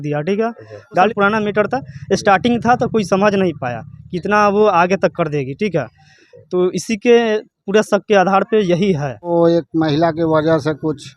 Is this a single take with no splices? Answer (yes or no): no